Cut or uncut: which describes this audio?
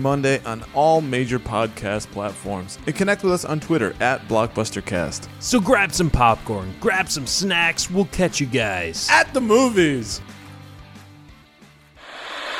cut